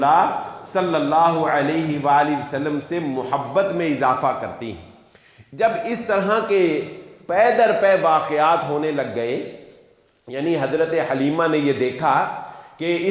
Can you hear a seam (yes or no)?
no